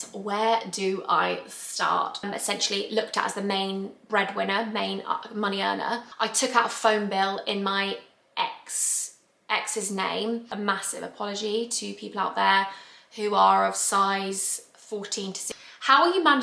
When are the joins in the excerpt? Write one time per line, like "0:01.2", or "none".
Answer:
0:02.2
0:06.1
0:10.5
0:15.4